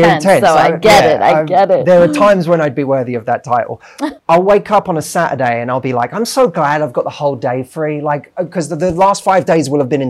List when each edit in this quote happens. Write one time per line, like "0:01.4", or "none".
0:04.2